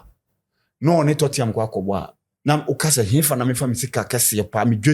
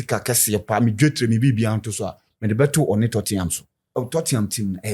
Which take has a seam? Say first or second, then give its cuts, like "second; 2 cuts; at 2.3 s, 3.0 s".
second; 1 cut; at 3.9 s